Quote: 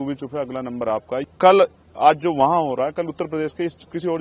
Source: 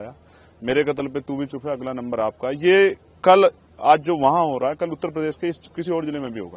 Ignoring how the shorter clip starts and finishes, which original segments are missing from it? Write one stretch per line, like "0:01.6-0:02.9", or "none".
0:02.5-0:03.0